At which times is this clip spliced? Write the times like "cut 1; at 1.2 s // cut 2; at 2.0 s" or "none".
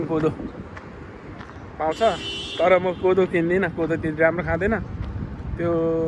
none